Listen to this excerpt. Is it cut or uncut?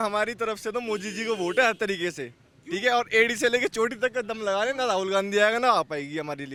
uncut